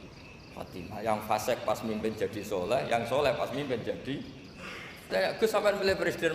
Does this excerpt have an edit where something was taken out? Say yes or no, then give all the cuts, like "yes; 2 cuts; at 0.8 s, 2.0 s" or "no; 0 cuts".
yes; 1 cut; at 5.1 s